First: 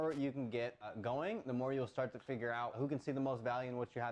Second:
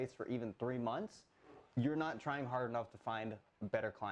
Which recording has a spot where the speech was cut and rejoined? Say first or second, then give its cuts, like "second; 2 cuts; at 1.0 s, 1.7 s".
first; 2 cuts; at 0.9 s, 2.8 s